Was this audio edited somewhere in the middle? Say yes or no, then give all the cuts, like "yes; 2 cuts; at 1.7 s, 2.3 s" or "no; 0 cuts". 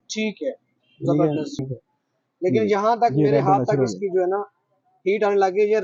yes; 1 cut; at 1.6 s